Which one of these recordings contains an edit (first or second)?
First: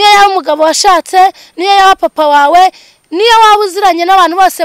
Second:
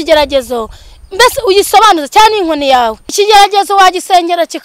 second